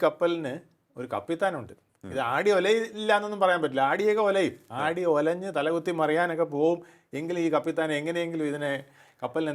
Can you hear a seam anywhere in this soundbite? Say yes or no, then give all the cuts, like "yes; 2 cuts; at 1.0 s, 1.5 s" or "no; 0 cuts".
no; 0 cuts